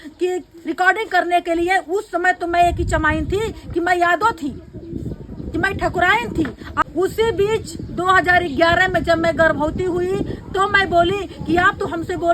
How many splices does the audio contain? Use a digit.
1